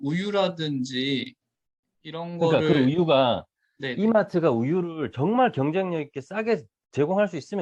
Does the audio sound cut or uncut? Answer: uncut